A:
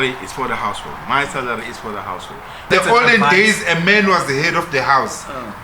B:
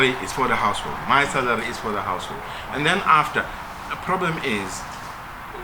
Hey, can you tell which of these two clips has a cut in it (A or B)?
A